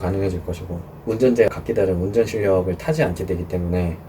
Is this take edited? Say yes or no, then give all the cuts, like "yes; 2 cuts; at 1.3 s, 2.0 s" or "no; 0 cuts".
yes; 2 cuts; at 0.9 s, 1.5 s